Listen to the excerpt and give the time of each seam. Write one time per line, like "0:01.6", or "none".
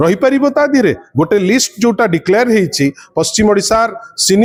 none